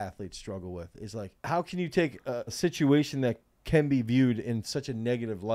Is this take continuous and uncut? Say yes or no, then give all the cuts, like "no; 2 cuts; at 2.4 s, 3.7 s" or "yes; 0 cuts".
no; 2 cuts; at 1.3 s, 2.6 s